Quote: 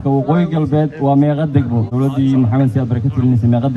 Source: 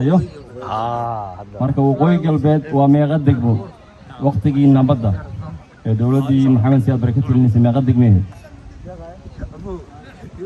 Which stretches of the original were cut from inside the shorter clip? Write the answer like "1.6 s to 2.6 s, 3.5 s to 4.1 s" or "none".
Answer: 3.6 s to 6.0 s